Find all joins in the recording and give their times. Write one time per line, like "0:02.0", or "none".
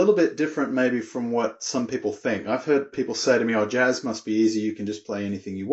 0:02.9